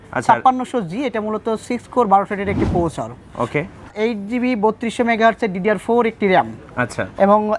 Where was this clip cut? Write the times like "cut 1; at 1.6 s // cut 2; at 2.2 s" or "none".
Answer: cut 1; at 3.9 s